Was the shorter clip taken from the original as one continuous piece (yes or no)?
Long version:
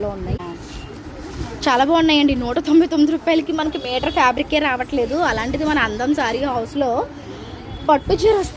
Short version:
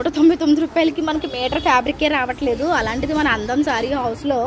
yes